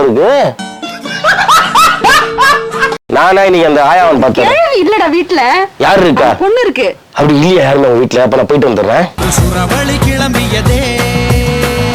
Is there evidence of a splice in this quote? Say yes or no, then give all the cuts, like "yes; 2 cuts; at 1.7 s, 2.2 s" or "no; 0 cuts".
yes; 1 cut; at 3.0 s